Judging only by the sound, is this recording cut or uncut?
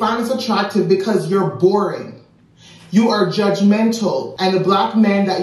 cut